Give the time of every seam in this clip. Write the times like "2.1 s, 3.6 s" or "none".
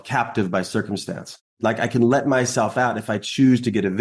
1.6 s